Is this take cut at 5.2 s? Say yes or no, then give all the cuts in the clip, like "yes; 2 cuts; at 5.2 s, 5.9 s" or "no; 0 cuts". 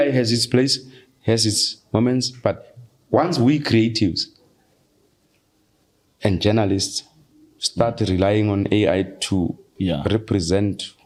no; 0 cuts